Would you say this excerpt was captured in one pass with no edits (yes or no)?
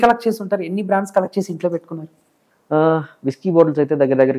yes